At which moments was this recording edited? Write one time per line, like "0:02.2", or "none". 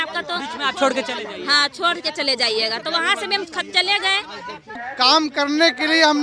0:04.9